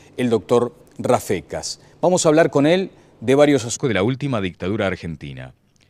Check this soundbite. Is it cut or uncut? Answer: uncut